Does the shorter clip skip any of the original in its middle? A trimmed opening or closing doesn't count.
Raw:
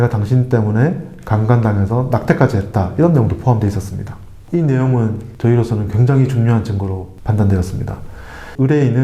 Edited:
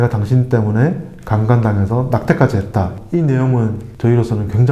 yes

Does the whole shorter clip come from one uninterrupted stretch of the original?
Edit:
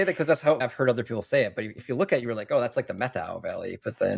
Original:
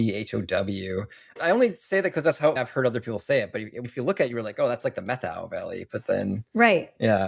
no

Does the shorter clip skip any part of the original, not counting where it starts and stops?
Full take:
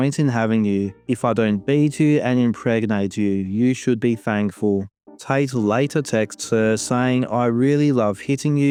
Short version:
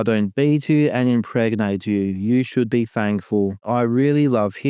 yes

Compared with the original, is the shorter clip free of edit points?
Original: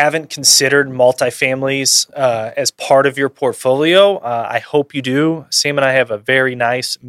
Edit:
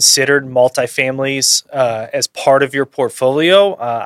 yes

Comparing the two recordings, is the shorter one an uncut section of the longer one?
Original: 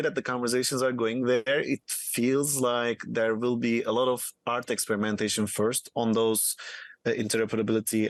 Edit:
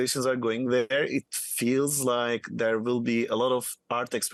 yes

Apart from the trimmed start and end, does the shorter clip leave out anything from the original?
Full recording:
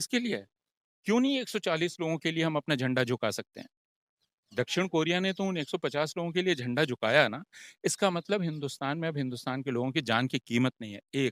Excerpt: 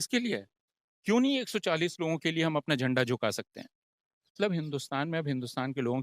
yes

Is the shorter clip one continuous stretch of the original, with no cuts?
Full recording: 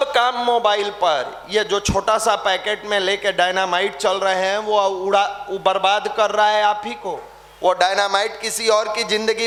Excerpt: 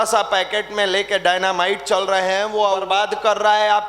no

